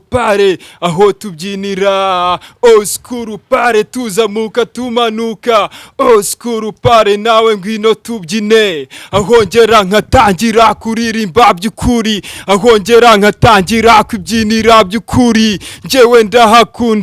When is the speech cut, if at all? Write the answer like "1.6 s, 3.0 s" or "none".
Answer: none